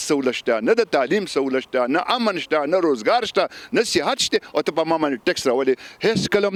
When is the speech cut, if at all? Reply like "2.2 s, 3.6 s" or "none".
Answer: none

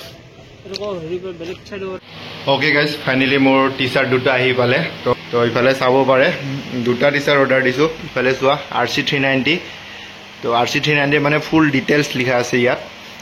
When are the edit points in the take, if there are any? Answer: 2.0 s, 5.1 s

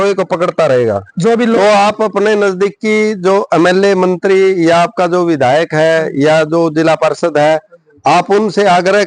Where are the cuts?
1.6 s

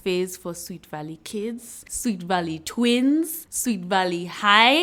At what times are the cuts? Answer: none

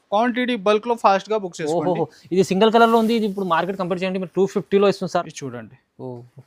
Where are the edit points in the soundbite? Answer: 5.4 s

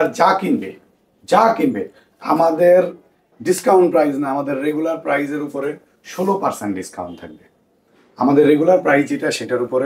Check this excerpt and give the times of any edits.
none

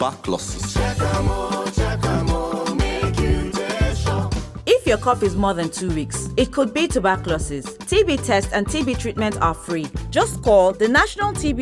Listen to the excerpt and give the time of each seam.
4.5 s

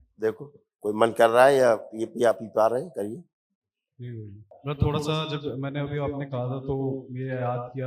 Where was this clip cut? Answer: 4.5 s

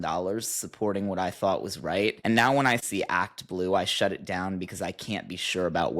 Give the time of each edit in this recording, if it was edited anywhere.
2.8 s

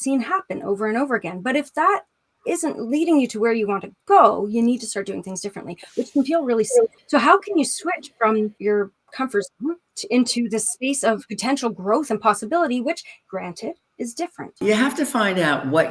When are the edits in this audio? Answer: 7.0 s, 8.6 s, 9.9 s, 11.3 s, 13.1 s, 14.6 s

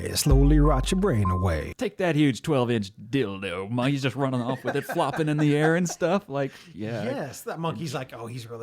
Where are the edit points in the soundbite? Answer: 1.7 s

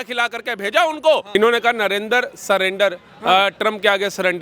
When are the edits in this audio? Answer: 1.3 s

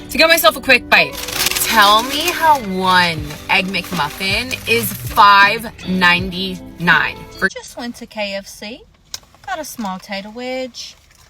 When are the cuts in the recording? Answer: 7.5 s

